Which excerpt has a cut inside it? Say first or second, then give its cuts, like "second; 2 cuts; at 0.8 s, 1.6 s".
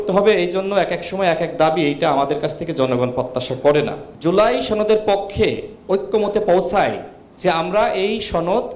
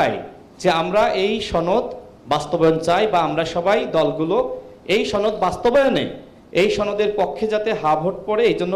first; 1 cut; at 4.0 s